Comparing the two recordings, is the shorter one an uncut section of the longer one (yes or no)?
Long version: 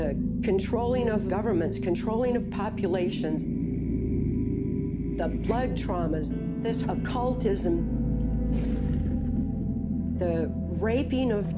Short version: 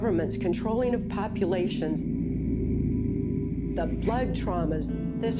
yes